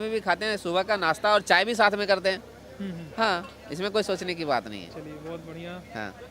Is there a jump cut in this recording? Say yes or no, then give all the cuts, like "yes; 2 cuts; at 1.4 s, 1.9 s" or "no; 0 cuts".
no; 0 cuts